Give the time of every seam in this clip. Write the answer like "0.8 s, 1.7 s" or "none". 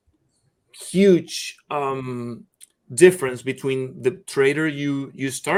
none